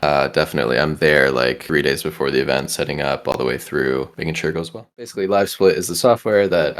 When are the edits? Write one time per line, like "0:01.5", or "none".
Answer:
0:05.0